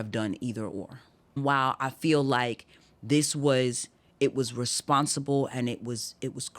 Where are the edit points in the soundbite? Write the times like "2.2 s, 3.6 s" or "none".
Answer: 1.4 s